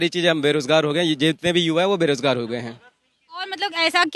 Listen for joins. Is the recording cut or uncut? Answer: uncut